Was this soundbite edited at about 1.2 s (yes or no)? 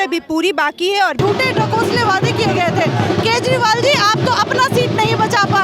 yes